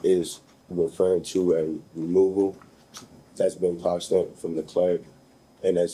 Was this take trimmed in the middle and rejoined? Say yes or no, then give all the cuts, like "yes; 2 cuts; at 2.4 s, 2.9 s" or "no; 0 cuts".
no; 0 cuts